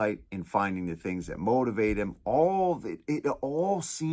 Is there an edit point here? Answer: no; 0 cuts

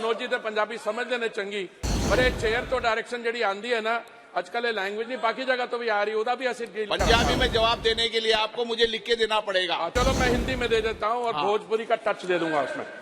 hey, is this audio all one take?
no; 1 cut; at 9.9 s

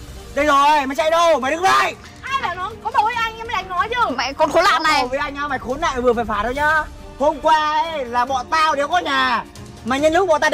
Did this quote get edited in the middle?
no; 0 cuts

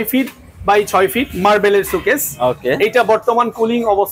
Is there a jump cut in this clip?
no; 0 cuts

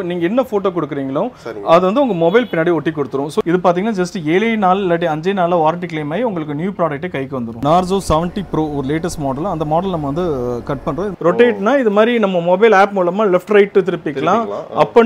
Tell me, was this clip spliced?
yes; 3 cuts; at 3.4 s, 7.5 s, 11.1 s

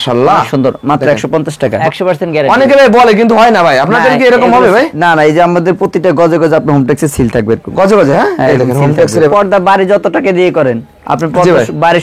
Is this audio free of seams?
no; 2 cuts; at 1.8 s, 9.3 s

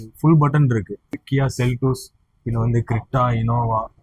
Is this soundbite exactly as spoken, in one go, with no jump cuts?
no; 1 cut; at 1.1 s

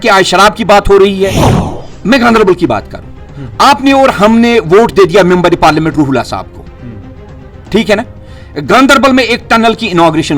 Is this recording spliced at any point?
yes; 1 cut; at 1.5 s

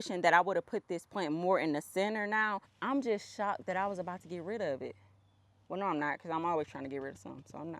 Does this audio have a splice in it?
yes; 1 cut; at 2.7 s

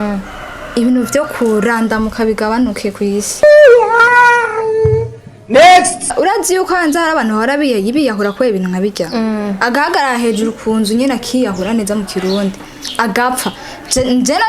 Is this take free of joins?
no; 1 cut; at 6.1 s

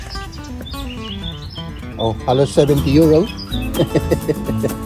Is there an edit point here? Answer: no; 0 cuts

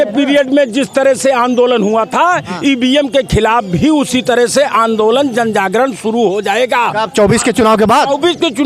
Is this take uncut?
yes; 0 cuts

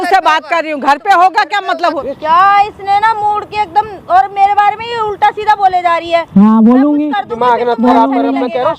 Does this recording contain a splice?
yes; 1 cut; at 2.0 s

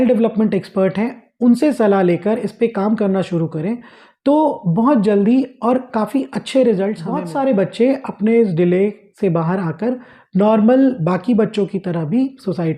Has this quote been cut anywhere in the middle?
yes; 1 cut; at 7.2 s

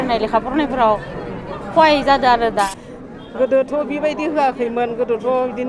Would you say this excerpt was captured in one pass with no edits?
no; 1 cut; at 2.7 s

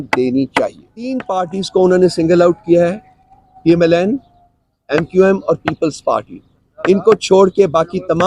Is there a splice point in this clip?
yes; 1 cut; at 1.2 s

